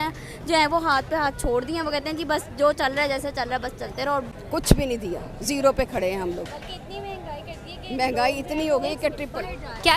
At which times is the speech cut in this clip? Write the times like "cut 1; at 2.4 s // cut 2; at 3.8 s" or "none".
cut 1; at 4.3 s